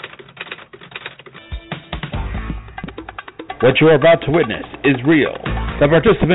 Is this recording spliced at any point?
no; 0 cuts

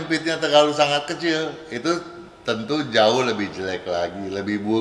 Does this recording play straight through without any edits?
yes; 0 cuts

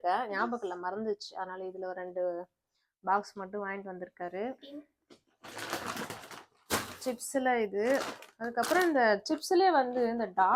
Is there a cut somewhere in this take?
no; 0 cuts

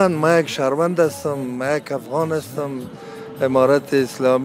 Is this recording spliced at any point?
no; 0 cuts

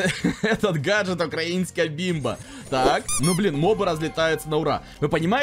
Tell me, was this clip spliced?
no; 0 cuts

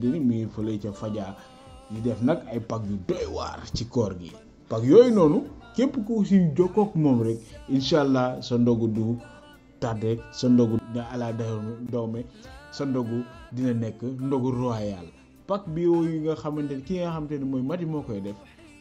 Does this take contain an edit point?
no; 0 cuts

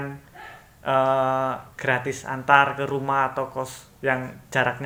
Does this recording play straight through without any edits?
yes; 0 cuts

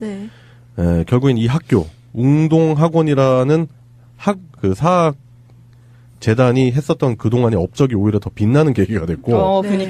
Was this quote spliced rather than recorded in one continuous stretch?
no; 0 cuts

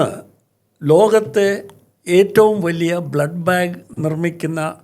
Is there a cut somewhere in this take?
yes; 1 cut; at 3.9 s

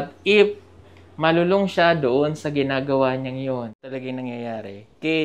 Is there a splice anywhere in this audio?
yes; 1 cut; at 3.9 s

